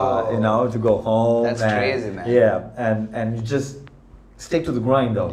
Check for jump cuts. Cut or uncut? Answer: uncut